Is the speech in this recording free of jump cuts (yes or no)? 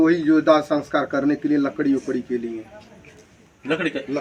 yes